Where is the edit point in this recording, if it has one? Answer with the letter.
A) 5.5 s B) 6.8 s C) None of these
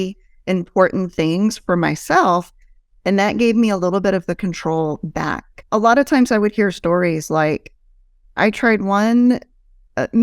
A